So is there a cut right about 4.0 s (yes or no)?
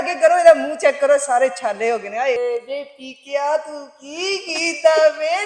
no